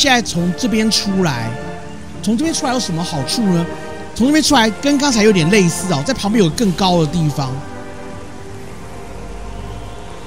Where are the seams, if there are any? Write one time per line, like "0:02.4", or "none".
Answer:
none

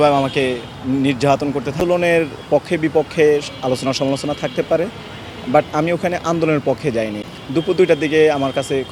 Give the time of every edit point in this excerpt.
0:01.8
0:07.2

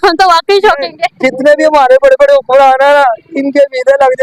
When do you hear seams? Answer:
none

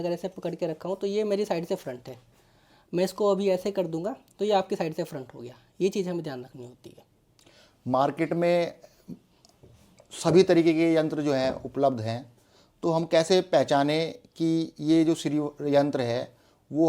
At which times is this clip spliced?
none

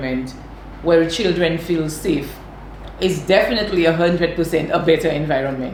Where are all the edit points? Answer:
none

